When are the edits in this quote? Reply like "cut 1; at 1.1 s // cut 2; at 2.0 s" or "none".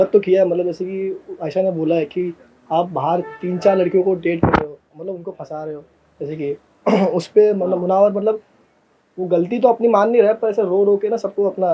none